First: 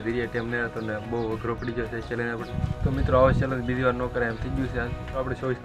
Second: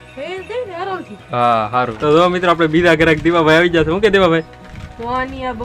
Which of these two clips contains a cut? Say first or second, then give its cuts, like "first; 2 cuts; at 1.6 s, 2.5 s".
second; 1 cut; at 1.9 s